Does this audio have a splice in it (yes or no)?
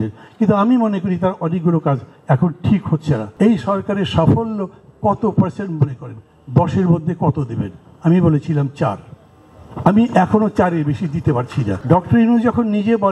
yes